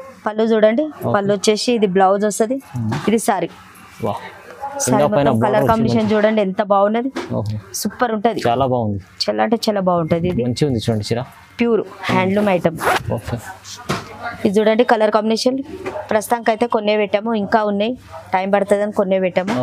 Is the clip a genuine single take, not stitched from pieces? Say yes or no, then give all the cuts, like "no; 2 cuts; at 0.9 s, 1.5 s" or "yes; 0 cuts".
yes; 0 cuts